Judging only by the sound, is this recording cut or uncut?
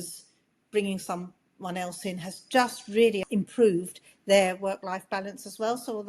cut